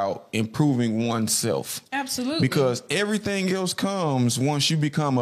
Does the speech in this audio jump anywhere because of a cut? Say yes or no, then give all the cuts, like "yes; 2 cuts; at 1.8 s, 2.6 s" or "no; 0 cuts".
no; 0 cuts